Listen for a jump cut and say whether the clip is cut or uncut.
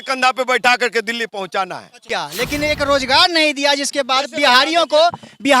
cut